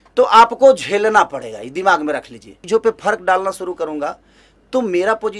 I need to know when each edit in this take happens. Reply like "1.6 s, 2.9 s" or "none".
2.5 s

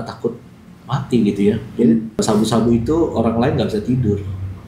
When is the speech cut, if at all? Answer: 2.2 s

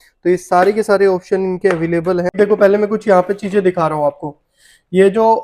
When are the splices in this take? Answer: 2.3 s

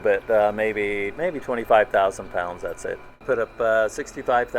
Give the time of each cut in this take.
1.1 s, 3.2 s

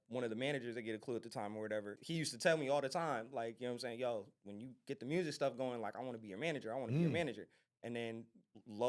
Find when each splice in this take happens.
2.0 s

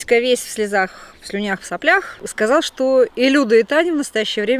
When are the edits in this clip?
2.2 s

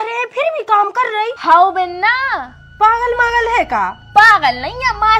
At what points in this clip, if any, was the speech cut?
1.4 s

